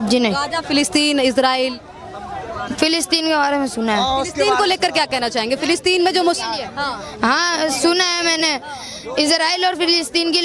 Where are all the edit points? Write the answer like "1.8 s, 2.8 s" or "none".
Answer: none